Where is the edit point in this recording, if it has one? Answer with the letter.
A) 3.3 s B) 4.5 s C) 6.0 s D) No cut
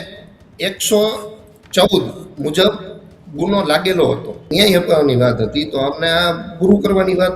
B